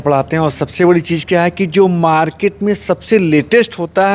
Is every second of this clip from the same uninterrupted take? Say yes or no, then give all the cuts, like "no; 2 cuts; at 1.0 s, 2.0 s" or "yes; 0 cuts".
yes; 0 cuts